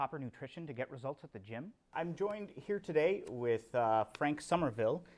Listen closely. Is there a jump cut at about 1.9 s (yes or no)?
yes